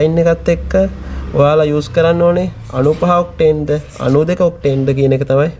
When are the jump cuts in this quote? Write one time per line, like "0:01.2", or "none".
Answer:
none